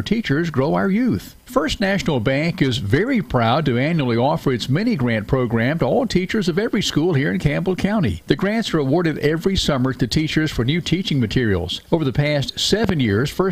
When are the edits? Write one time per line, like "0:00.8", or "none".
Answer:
0:01.3